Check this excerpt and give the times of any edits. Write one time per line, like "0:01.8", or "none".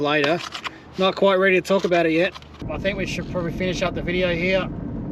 0:02.5